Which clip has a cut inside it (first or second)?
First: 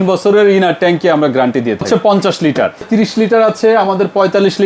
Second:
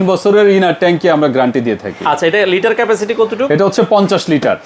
first